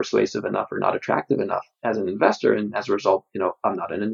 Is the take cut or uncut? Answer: uncut